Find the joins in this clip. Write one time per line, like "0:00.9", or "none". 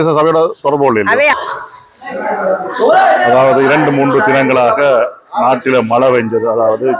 0:01.3